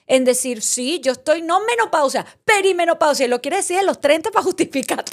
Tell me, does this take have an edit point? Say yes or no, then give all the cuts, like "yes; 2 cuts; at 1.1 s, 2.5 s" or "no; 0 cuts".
no; 0 cuts